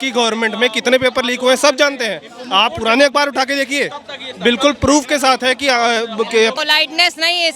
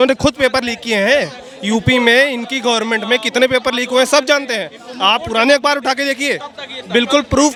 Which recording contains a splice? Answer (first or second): first